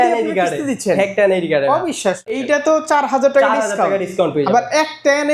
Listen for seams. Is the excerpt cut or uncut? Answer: cut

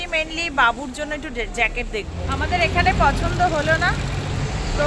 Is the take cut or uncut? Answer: cut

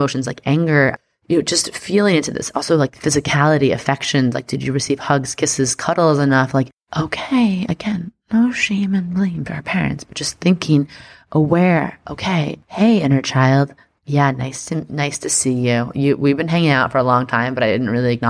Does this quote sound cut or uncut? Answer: cut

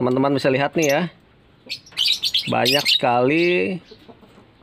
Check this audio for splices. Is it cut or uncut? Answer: uncut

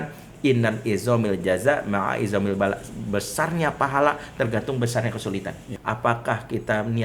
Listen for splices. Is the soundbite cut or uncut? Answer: cut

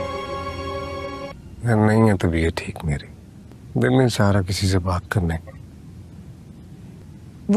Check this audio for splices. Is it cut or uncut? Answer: uncut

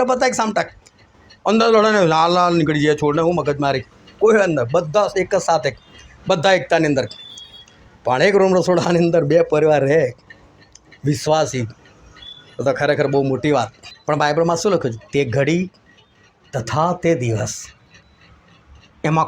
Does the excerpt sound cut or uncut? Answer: cut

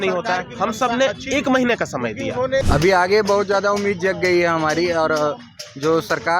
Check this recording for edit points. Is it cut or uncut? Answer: cut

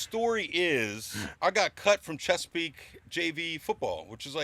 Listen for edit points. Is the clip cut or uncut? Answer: uncut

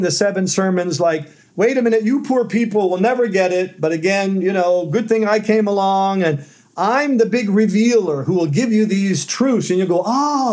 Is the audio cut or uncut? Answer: uncut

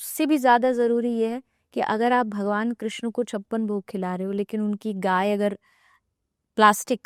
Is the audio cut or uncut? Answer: uncut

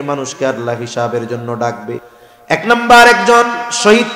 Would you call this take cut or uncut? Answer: cut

